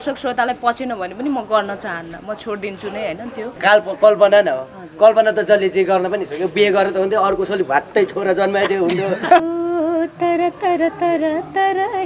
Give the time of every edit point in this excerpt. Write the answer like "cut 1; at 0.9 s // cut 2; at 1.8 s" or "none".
cut 1; at 3.6 s // cut 2; at 9.4 s